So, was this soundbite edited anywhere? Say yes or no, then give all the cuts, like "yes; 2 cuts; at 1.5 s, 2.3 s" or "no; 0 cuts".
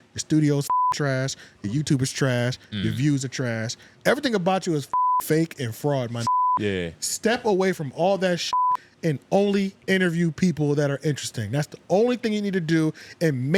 no; 0 cuts